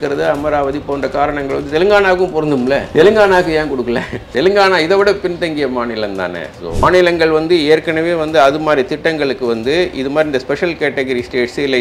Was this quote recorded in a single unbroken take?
no; 3 cuts; at 2.9 s, 4.3 s, 6.8 s

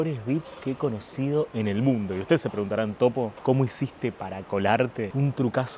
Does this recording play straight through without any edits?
yes; 0 cuts

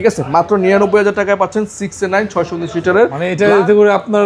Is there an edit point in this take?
yes; 1 cut; at 3.2 s

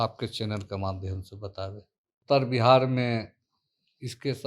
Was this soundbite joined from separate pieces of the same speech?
yes; 1 cut; at 2.2 s

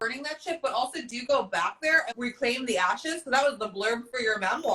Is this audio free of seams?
no; 1 cut; at 2.1 s

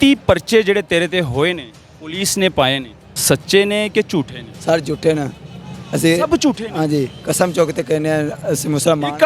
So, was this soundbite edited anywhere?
yes; 1 cut; at 3.1 s

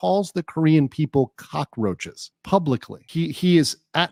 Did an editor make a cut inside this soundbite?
no; 0 cuts

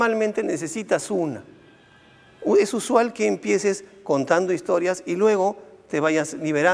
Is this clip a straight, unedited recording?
yes; 0 cuts

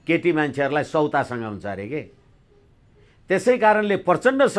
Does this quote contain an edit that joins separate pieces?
no; 0 cuts

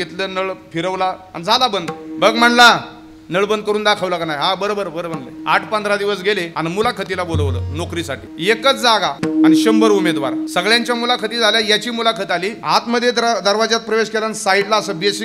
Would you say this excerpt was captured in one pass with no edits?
no; 6 cuts; at 5.3 s, 6.5 s, 8.3 s, 9.2 s, 10.4 s, 12.6 s

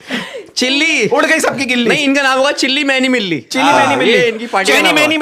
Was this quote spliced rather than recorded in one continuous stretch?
no; 0 cuts

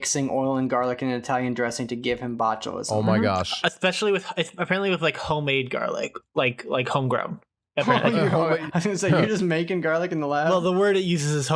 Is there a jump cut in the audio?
no; 0 cuts

